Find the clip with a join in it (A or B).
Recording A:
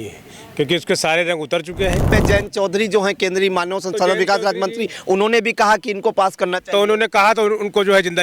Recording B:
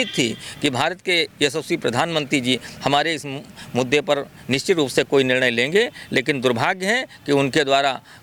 A